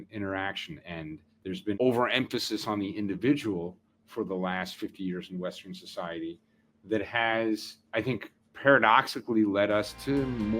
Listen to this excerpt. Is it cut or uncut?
cut